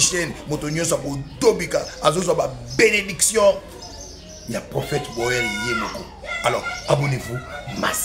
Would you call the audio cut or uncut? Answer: uncut